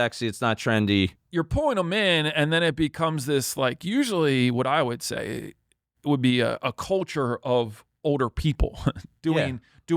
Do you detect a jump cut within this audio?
yes; 1 cut; at 1.2 s

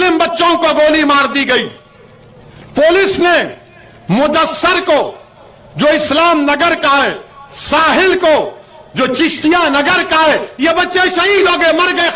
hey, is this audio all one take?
yes; 0 cuts

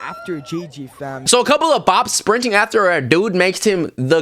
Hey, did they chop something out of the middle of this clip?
no; 0 cuts

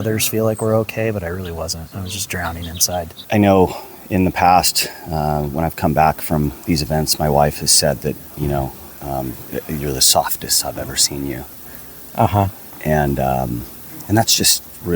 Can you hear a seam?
yes; 1 cut; at 3.3 s

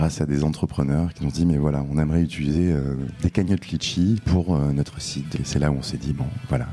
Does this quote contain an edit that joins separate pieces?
yes; 3 cuts; at 1.1 s, 4.2 s, 5.3 s

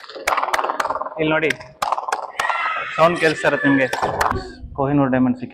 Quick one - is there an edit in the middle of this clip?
yes; 1 cut; at 4.3 s

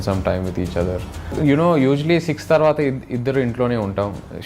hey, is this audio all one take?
no; 1 cut; at 1.3 s

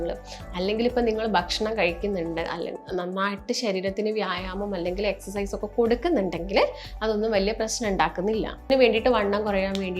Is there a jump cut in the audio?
yes; 1 cut; at 8.7 s

